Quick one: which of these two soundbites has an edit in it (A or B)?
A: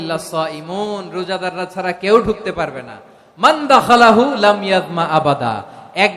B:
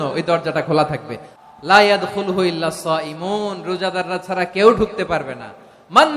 B